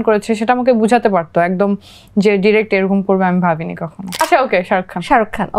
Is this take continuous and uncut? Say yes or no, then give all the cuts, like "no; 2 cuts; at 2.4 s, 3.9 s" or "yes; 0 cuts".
no; 1 cut; at 4.2 s